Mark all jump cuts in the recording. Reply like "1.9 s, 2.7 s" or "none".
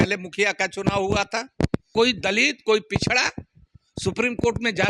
1.9 s